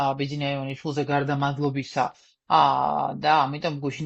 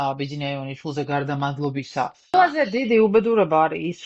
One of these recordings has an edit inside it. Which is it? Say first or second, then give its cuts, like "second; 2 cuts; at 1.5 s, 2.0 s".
second; 1 cut; at 2.3 s